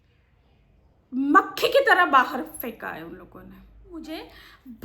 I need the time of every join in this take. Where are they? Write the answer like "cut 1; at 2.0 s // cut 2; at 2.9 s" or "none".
cut 1; at 3.9 s